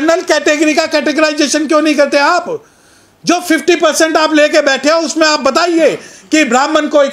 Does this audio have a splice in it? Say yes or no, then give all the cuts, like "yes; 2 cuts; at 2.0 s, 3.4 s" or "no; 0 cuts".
no; 0 cuts